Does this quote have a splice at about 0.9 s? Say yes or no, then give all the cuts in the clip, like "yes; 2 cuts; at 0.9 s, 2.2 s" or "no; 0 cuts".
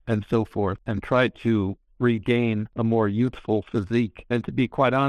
yes; 3 cuts; at 0.9 s, 2.7 s, 4.2 s